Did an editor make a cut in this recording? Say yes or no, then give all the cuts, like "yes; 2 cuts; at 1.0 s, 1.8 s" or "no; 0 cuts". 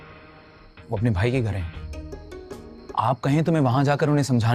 no; 0 cuts